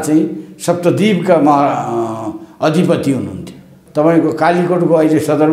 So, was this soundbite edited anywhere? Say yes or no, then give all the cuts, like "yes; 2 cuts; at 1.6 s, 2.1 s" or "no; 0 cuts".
yes; 1 cut; at 3.7 s